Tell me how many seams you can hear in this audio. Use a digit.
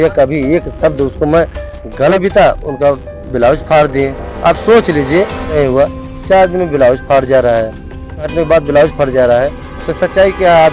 3